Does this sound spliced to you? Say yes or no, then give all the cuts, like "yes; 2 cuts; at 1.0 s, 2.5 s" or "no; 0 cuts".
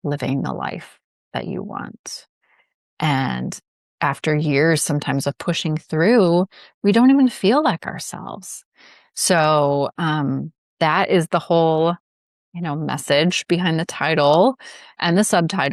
no; 0 cuts